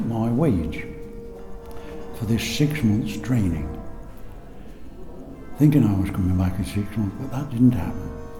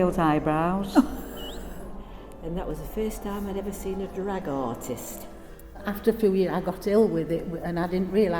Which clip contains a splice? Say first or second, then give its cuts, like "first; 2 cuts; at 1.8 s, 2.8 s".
second; 2 cuts; at 2.0 s, 5.8 s